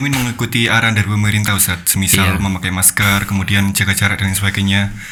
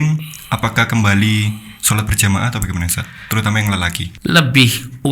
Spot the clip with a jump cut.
second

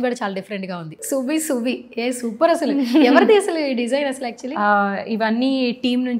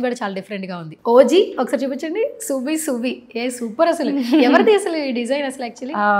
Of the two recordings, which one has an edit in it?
first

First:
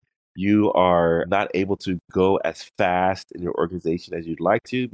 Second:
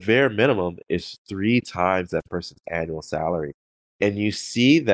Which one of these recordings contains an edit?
first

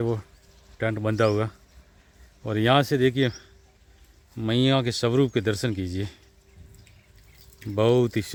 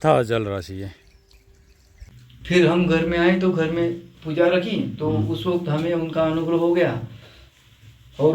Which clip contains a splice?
second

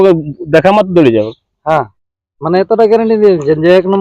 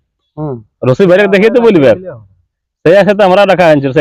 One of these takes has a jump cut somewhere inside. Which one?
first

